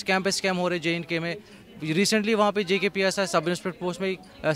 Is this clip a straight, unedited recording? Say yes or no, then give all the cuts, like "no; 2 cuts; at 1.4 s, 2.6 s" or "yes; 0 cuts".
yes; 0 cuts